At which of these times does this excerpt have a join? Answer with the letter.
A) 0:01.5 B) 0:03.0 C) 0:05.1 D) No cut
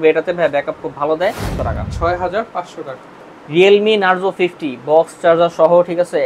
A